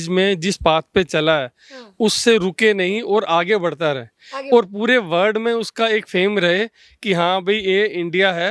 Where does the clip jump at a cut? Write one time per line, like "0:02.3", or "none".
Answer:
none